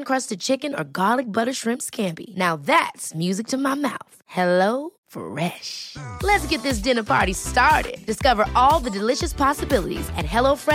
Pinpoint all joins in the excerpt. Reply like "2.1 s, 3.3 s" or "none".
none